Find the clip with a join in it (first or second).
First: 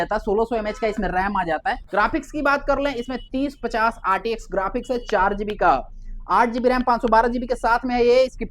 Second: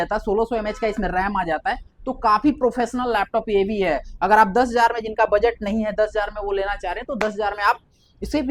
first